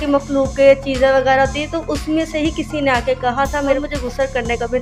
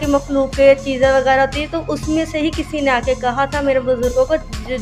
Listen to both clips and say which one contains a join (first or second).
first